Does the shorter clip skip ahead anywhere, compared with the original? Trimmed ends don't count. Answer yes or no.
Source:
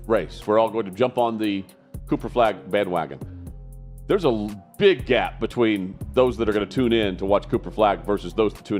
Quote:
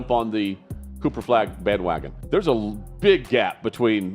yes